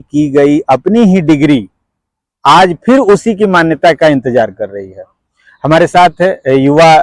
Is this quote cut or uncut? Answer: uncut